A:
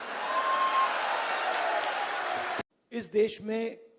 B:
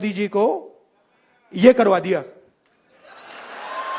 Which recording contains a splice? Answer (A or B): A